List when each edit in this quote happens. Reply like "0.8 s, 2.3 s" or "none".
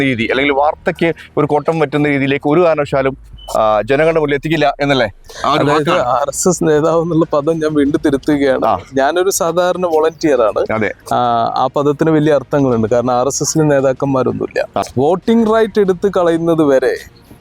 14.8 s